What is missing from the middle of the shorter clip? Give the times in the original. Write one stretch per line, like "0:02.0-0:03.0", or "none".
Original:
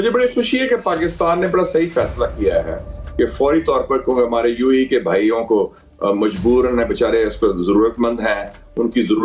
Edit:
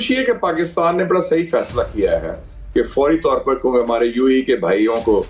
none